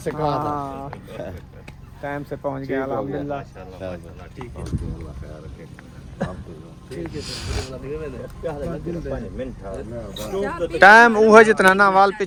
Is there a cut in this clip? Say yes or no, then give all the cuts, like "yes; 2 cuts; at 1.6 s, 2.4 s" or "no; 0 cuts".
no; 0 cuts